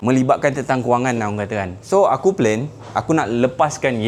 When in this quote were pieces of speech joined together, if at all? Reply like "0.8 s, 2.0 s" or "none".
none

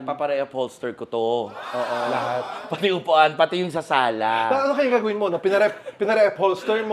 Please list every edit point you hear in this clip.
none

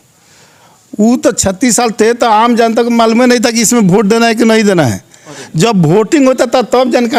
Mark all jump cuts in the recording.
none

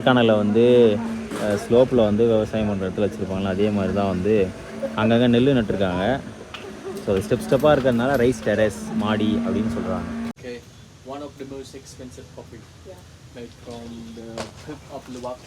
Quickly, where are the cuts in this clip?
10.3 s

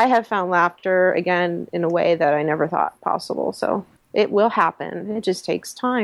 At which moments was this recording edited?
4.0 s

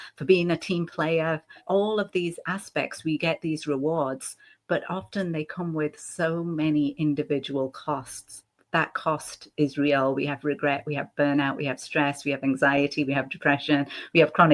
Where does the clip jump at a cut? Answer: 1.6 s, 8.3 s

